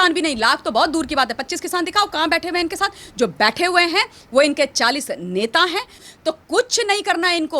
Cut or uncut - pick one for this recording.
cut